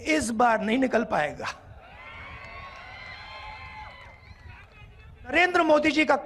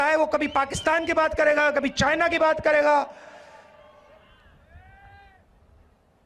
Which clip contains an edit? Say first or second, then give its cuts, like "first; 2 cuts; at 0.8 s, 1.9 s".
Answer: first; 1 cut; at 5.3 s